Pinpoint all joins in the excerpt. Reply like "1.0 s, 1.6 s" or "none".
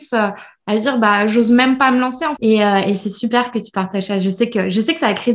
2.3 s